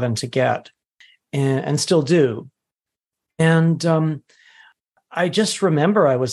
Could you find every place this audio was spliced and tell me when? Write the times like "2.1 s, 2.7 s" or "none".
none